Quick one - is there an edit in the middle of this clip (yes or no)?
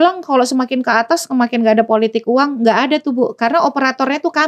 no